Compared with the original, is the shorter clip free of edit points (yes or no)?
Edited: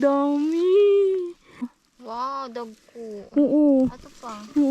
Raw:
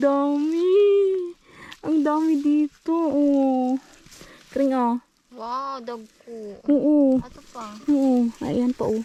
no